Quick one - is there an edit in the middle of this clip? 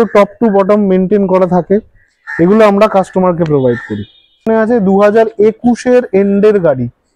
yes; 1 cut; at 4.5 s

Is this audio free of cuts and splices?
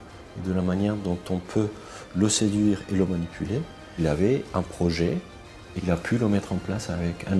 no; 2 cuts; at 3.9 s, 5.8 s

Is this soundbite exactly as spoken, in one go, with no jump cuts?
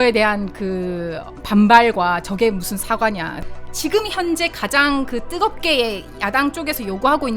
no; 1 cut; at 3.4 s

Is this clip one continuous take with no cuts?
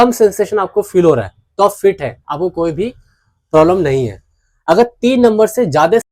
yes; 0 cuts

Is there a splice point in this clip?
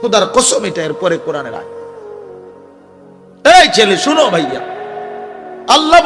no; 0 cuts

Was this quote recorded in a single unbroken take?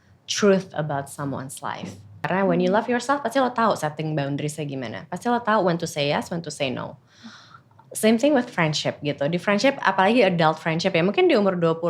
no; 1 cut; at 2.1 s

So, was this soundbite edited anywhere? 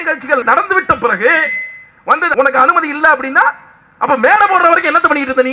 yes; 1 cut; at 2.3 s

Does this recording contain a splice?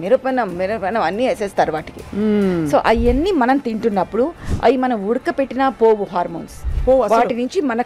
no; 0 cuts

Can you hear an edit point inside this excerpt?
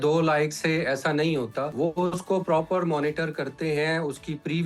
yes; 1 cut; at 1.7 s

